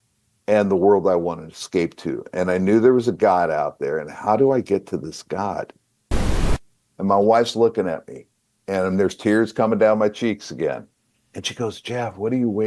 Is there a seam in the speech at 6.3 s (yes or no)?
yes